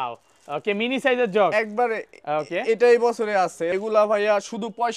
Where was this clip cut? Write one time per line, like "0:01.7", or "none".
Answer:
0:03.7